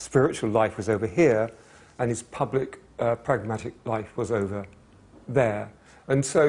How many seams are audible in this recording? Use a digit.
1